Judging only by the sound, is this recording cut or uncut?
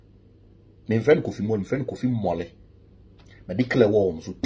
uncut